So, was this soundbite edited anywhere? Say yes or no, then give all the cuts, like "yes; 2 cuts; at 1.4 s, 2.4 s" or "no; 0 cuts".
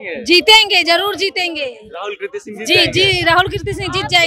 no; 0 cuts